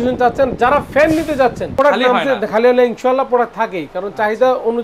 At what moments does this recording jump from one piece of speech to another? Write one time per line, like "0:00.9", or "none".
0:01.7